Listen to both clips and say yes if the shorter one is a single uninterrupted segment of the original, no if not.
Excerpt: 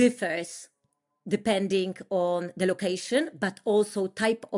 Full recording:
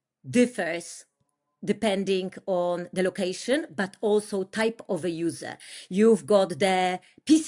yes